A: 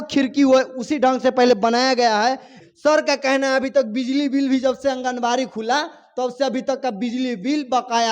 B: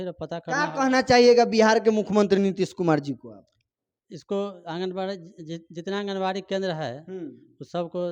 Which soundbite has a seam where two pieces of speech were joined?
A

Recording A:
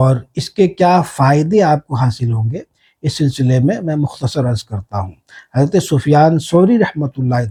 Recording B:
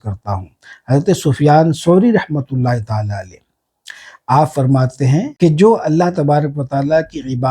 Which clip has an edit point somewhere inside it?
B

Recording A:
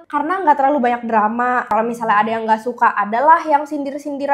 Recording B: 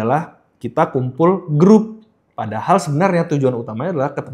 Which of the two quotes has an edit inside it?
A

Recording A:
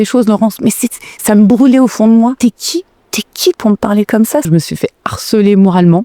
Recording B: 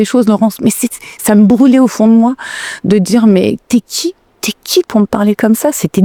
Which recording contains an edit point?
A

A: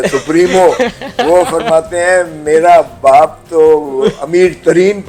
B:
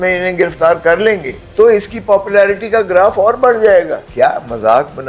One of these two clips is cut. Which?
B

